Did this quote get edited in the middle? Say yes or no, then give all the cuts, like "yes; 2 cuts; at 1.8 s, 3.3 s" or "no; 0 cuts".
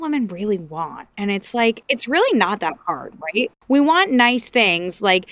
no; 0 cuts